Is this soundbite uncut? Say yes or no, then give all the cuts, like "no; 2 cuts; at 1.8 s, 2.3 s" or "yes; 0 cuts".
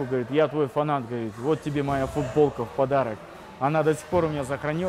yes; 0 cuts